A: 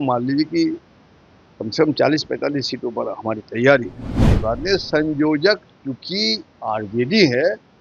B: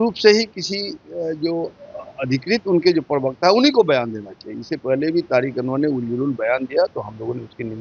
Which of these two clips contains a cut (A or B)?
A